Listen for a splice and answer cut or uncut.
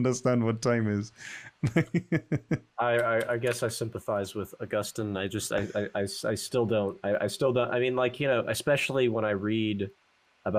uncut